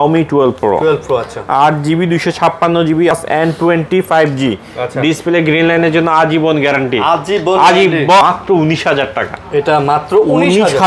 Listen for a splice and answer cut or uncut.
cut